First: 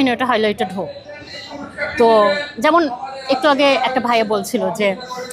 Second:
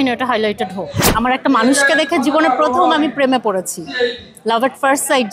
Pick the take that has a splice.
second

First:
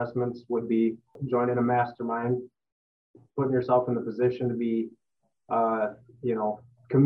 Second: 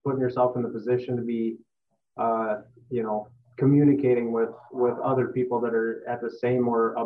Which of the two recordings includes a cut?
first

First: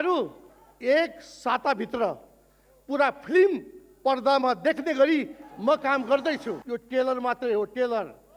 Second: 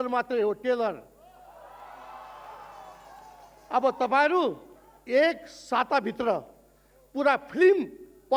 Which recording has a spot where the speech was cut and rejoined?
first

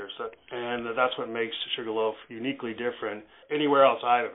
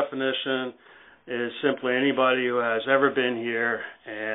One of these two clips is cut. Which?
first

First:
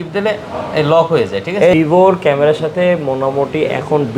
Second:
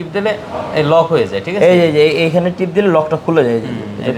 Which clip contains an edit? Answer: first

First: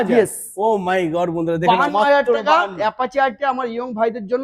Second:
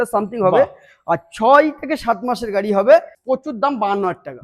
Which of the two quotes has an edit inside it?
second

